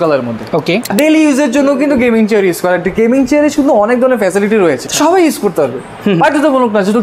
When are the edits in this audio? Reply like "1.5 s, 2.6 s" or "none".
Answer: 0.9 s, 4.9 s

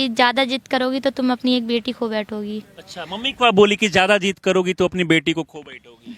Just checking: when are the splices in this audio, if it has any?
none

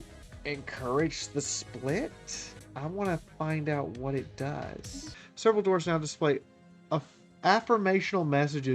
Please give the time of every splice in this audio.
5.2 s

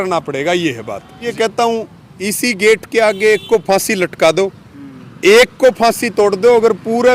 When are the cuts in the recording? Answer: 1.3 s

